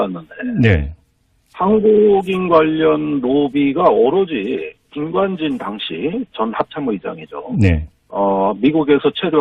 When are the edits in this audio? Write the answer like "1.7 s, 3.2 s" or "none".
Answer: 4.4 s

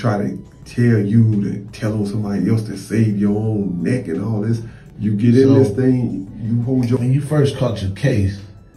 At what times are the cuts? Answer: 7.0 s

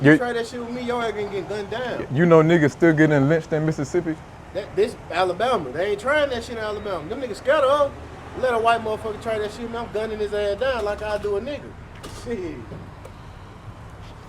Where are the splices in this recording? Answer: none

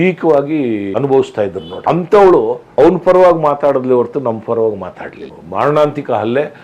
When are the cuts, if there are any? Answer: 0.9 s, 1.7 s, 2.7 s, 5.4 s

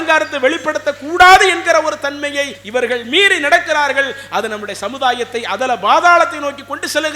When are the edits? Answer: 2.6 s

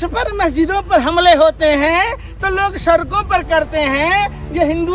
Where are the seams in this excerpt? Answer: none

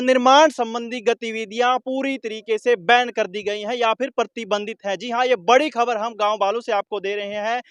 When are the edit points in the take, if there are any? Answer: none

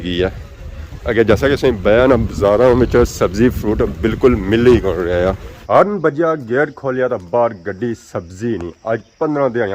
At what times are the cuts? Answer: 5.5 s

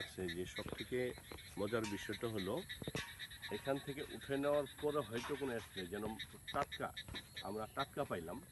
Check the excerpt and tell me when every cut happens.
none

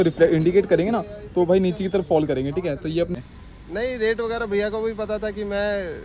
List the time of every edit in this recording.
3.1 s

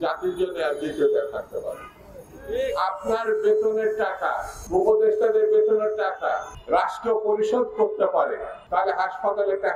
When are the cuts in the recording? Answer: 4.5 s, 6.5 s, 8.5 s

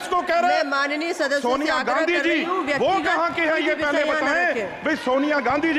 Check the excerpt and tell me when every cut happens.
none

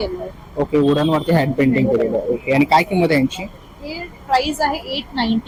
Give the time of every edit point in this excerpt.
none

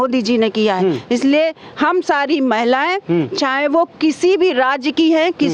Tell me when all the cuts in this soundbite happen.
none

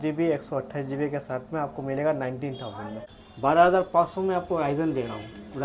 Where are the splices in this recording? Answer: 3.0 s

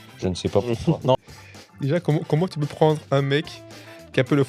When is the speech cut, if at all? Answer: 1.1 s

